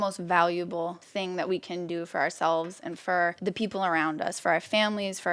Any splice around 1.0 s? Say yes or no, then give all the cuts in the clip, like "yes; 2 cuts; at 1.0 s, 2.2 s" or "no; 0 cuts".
yes; 2 cuts; at 1.0 s, 3.4 s